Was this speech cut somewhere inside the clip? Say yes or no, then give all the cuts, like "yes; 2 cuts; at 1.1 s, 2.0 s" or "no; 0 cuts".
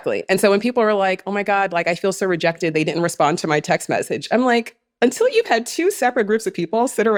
no; 0 cuts